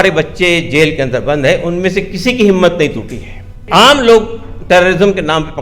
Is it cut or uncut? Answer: cut